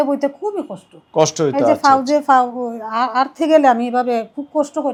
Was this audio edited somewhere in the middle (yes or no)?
no